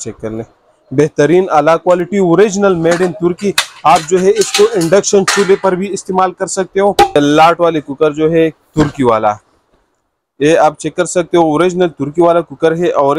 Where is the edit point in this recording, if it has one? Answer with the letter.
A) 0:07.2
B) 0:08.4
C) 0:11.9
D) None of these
A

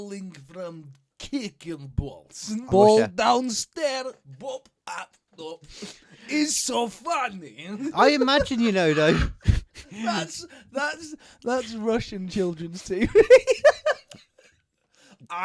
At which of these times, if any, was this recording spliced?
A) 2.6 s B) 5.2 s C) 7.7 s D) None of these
A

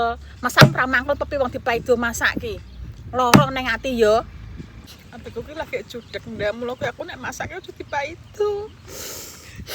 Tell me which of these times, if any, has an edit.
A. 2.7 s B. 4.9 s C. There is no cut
B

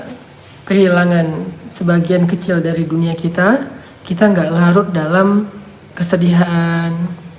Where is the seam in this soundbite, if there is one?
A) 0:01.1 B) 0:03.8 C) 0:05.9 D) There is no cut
C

